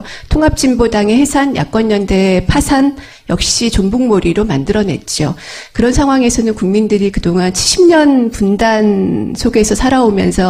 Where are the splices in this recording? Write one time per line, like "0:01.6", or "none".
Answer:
0:09.2